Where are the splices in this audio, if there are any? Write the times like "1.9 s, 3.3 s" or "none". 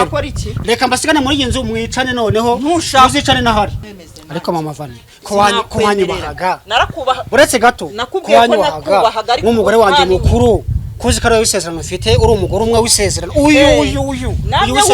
3.9 s